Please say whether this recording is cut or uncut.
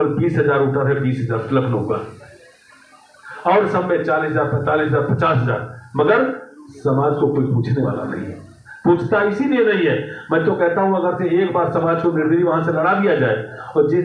uncut